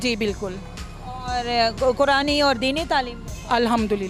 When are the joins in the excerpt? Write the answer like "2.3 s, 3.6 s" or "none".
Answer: none